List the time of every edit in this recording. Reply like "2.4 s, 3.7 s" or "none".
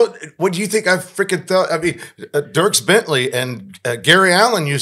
none